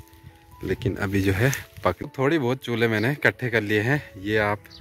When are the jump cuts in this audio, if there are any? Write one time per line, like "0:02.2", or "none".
0:01.7